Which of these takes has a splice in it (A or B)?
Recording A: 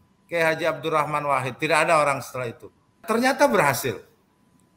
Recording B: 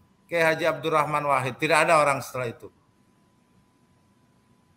A